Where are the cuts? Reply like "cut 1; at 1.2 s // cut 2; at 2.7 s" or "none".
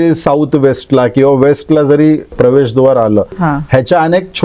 cut 1; at 2.3 s // cut 2; at 3.3 s

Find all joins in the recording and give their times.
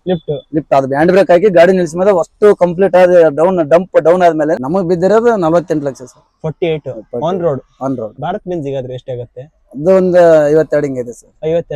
cut 1; at 4.6 s // cut 2; at 8.1 s

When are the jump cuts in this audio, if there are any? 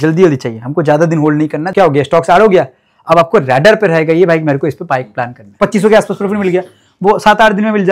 cut 1; at 1.7 s // cut 2; at 5.6 s

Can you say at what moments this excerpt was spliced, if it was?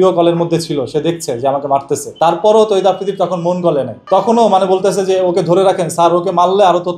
cut 1; at 2.1 s // cut 2; at 4.0 s

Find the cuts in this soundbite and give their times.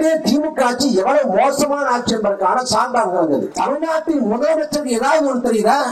cut 1; at 3.5 s

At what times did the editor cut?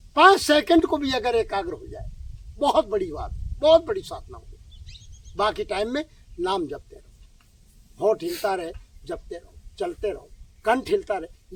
none

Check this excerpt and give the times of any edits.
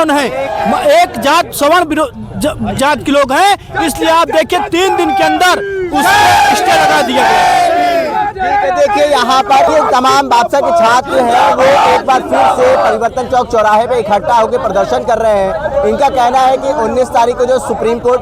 none

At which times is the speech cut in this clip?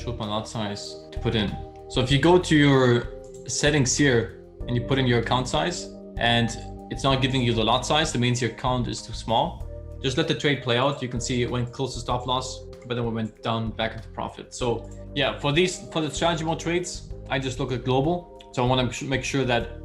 cut 1; at 9.7 s // cut 2; at 15.0 s

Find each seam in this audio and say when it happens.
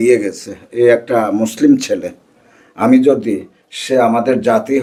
none

